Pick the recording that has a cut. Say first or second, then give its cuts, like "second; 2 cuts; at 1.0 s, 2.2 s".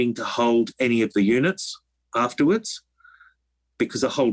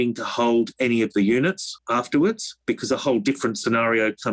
second; 2 cuts; at 1.7 s, 2.5 s